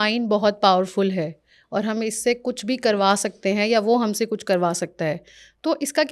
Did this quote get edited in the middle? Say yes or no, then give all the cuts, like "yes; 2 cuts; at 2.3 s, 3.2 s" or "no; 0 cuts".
no; 0 cuts